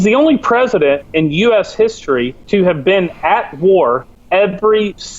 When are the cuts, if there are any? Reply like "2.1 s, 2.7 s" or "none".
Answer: 2.4 s, 4.1 s